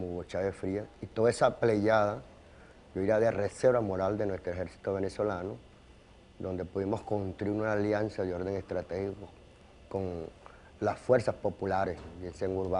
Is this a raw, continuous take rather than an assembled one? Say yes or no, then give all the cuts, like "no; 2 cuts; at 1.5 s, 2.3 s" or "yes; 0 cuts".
yes; 0 cuts